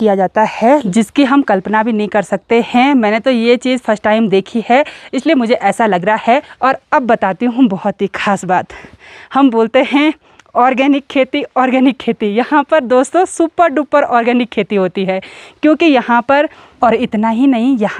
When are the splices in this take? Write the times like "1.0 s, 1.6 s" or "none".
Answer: 0.8 s, 6.5 s, 16.7 s